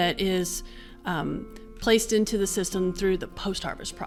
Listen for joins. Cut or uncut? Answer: uncut